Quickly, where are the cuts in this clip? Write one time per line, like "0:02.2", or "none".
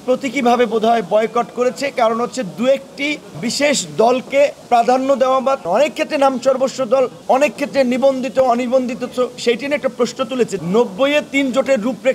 0:03.3
0:04.6
0:05.6
0:07.2
0:10.5

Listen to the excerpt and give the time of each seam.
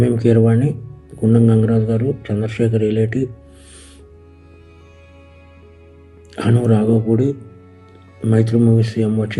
0:03.4
0:05.3

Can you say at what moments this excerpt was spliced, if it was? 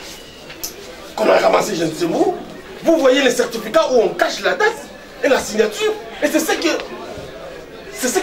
none

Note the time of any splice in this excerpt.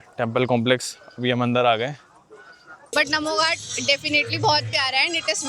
0:02.9

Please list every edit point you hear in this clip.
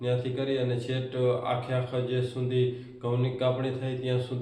none

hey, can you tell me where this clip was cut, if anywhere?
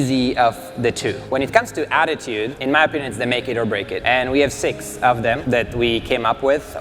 0:01.2
0:02.6
0:04.0
0:05.4

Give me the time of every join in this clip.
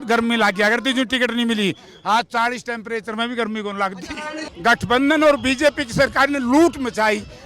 0:04.3

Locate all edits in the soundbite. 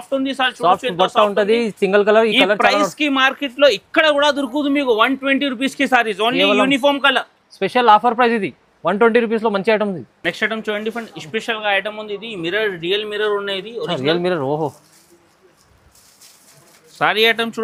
none

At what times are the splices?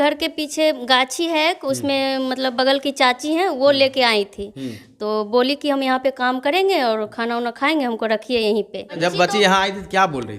0:08.9

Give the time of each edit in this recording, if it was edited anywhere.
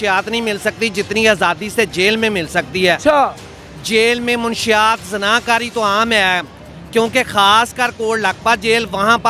none

